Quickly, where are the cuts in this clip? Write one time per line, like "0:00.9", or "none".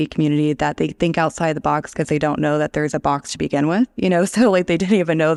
none